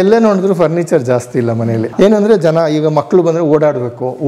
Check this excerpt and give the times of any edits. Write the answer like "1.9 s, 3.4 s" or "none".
1.9 s